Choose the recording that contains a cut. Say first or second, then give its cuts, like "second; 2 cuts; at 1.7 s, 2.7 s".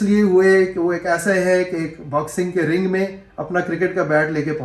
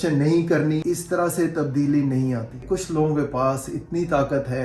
second; 2 cuts; at 0.8 s, 2.6 s